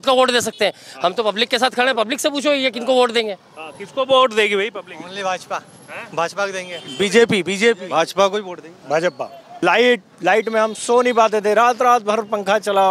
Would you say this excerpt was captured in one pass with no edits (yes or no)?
no